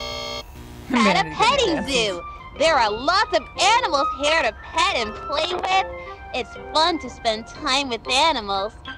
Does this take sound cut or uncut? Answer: cut